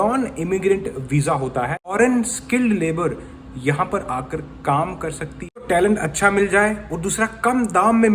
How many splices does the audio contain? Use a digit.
2